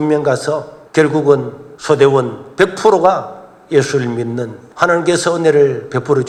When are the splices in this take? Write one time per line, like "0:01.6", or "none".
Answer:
none